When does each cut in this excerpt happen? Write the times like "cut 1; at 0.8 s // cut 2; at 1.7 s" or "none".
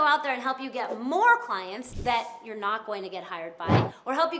cut 1; at 1.9 s